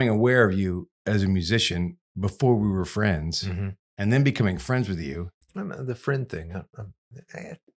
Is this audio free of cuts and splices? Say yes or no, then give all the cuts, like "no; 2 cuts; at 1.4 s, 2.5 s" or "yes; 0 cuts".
no; 1 cut; at 0.9 s